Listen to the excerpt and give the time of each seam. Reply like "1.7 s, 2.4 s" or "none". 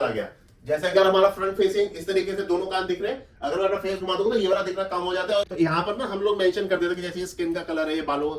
5.4 s